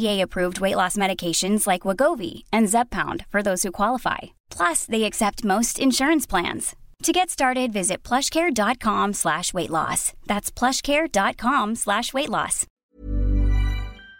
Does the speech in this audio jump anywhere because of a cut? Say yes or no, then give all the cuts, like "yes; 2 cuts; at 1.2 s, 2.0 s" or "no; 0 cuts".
yes; 1 cut; at 13.0 s